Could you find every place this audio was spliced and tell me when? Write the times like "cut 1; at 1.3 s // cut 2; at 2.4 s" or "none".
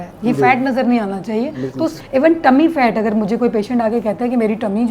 cut 1; at 2.0 s